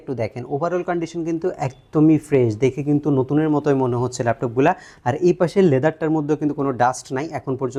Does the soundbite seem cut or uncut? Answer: uncut